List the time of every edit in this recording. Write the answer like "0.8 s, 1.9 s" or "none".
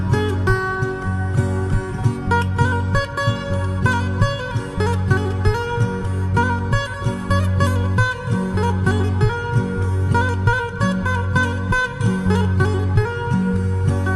none